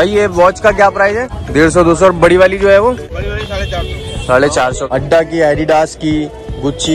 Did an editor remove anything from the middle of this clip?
yes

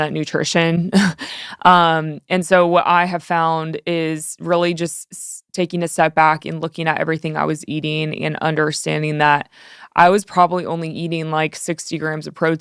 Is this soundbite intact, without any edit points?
yes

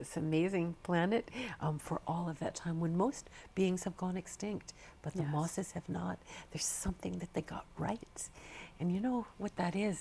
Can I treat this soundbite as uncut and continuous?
yes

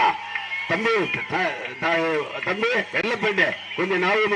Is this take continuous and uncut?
yes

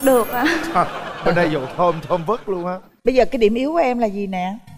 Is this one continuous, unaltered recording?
yes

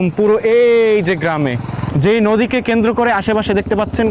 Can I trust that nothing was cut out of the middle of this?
yes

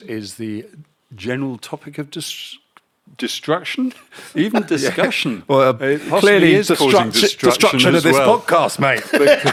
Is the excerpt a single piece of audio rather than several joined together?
yes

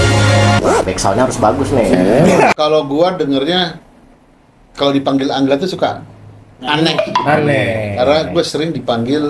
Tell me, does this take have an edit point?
yes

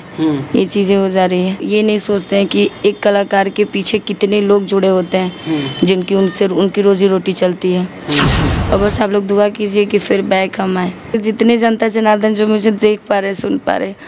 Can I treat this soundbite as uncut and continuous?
no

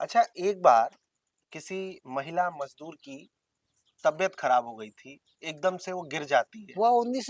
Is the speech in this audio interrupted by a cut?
no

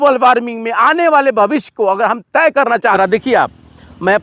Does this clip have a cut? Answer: yes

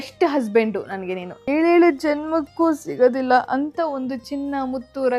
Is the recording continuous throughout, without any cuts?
no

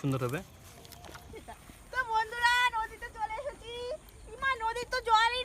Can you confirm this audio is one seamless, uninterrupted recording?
no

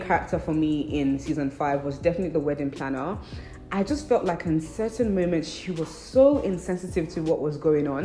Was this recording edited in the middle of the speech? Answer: no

